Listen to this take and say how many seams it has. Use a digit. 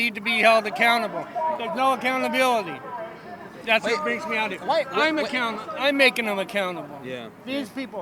0